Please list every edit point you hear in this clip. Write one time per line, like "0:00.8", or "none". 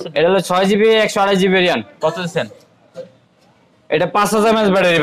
none